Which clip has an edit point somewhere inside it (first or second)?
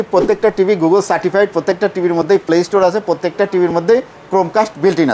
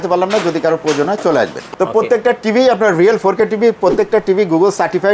second